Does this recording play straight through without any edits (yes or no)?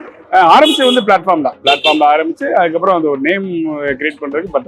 yes